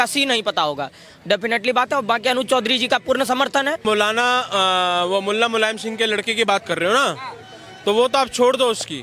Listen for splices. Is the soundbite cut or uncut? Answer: cut